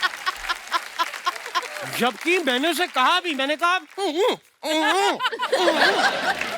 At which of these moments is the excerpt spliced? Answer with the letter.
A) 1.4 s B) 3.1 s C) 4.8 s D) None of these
D